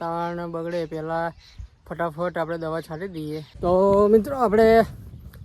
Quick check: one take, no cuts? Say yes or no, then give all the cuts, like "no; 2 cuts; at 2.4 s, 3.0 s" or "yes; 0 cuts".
no; 1 cut; at 3.5 s